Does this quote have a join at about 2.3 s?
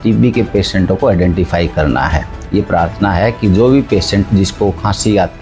yes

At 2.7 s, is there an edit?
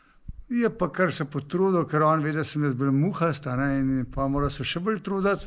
no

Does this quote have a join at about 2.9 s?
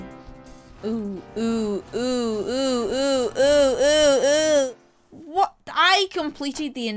no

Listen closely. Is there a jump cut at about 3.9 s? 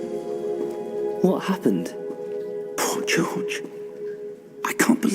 no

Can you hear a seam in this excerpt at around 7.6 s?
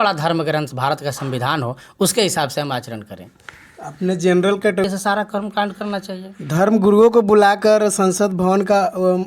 no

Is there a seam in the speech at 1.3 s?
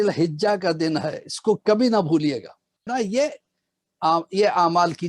no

